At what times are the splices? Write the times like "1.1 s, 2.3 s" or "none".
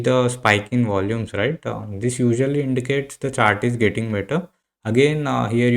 none